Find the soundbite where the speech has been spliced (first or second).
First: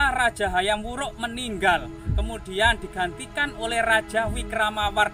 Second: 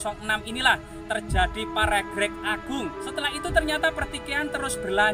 second